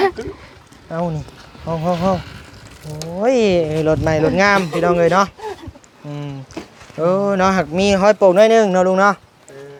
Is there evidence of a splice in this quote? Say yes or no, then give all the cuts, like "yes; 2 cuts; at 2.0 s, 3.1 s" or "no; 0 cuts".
no; 0 cuts